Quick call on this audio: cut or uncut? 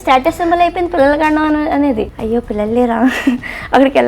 cut